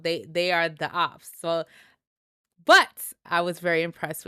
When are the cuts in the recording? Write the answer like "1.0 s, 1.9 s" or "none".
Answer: 3.3 s

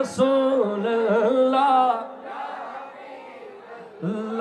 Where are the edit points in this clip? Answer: none

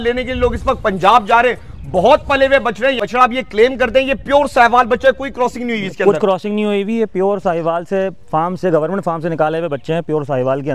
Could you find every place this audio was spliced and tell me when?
3.0 s

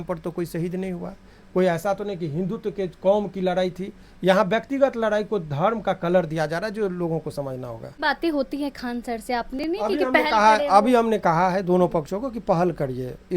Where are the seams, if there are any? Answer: 7.9 s

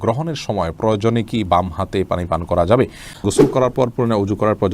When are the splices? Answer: 3.2 s

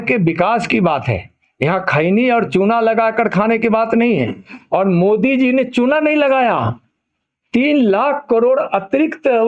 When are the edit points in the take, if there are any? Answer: none

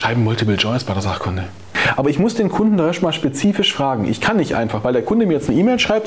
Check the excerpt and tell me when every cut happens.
1.8 s

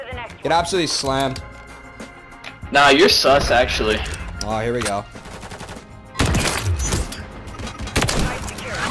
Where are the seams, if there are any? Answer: 5.2 s, 7.7 s

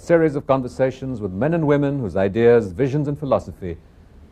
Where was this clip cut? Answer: 2.1 s

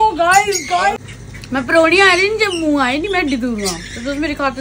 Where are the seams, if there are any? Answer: 0.9 s

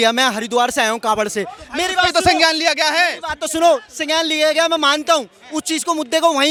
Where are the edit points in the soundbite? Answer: none

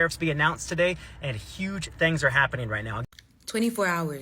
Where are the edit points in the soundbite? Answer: 2.9 s

